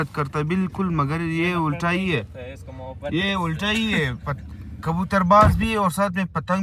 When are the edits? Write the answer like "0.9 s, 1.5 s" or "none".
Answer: none